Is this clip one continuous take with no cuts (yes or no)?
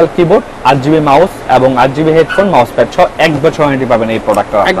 yes